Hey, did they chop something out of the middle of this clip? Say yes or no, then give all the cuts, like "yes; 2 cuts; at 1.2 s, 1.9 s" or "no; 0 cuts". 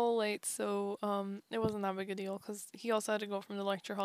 no; 0 cuts